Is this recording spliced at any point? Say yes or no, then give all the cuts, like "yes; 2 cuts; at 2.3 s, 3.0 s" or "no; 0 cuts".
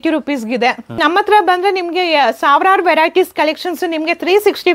yes; 1 cut; at 1.0 s